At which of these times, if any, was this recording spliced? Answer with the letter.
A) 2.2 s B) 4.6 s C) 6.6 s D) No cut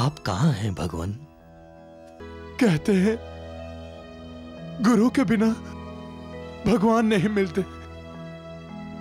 A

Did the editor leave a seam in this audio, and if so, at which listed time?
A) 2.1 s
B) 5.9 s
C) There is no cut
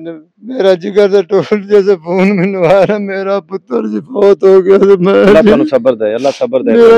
C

